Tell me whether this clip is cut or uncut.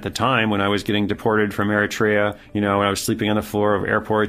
cut